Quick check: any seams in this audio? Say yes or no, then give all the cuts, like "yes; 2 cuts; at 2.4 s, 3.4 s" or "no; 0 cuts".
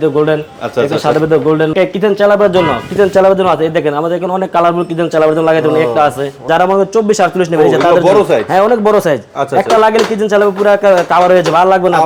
yes; 2 cuts; at 1.7 s, 6.5 s